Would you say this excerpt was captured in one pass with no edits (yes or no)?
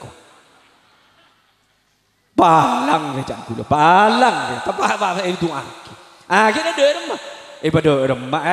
yes